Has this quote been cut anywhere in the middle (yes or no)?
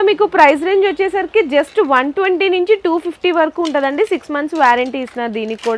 no